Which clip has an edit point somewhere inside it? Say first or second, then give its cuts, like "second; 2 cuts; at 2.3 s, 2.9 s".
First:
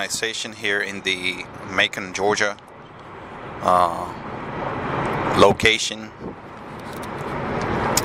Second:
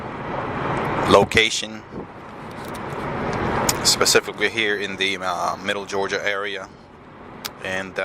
second; 1 cut; at 4.9 s